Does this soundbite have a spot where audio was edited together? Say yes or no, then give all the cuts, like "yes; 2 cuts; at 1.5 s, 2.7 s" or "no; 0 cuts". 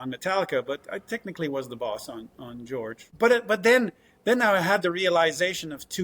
yes; 1 cut; at 3.0 s